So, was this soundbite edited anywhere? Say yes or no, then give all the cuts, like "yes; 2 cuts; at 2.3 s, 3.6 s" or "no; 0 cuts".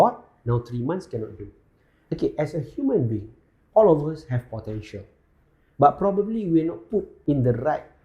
yes; 1 cut; at 7.1 s